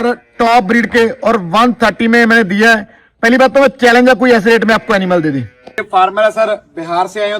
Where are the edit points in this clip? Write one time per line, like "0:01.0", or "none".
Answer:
0:05.8